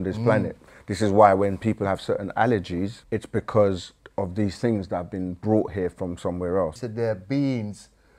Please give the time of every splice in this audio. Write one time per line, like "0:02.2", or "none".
0:03.0
0:04.0
0:06.8